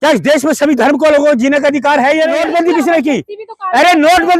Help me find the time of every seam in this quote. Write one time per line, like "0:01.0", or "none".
0:02.4